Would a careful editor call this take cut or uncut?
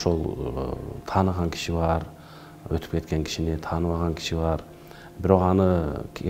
uncut